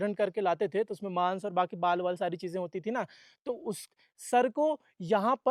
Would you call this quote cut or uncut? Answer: uncut